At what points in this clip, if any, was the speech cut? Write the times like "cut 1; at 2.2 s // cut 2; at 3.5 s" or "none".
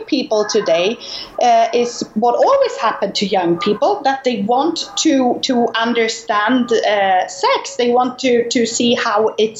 none